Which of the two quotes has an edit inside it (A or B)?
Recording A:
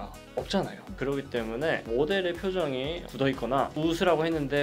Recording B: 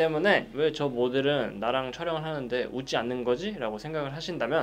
A